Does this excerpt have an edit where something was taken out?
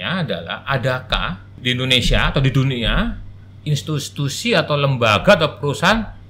yes; 1 cut; at 1.5 s

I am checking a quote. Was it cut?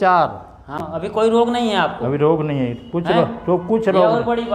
yes; 1 cut; at 1.0 s

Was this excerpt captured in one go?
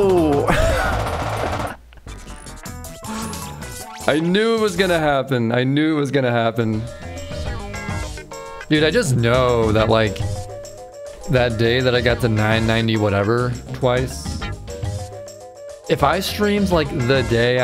no; 1 cut; at 6.8 s

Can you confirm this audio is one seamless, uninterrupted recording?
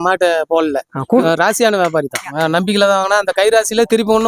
no; 1 cut; at 1.2 s

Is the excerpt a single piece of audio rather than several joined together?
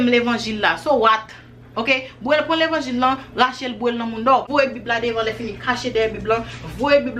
no; 1 cut; at 4.5 s

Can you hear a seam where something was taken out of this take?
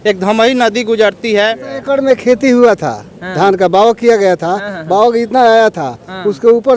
yes; 1 cut; at 1.7 s

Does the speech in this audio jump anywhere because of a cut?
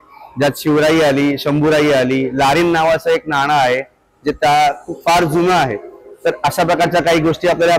no; 0 cuts

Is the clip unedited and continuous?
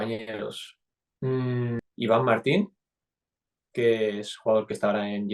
no; 1 cut; at 1.8 s

